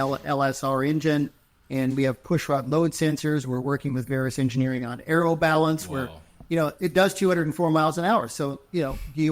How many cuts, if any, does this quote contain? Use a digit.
0